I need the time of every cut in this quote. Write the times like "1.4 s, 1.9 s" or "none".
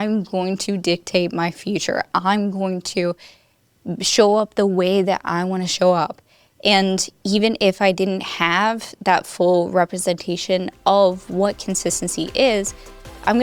none